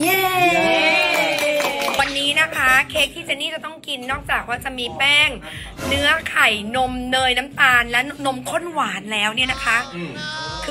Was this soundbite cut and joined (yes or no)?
no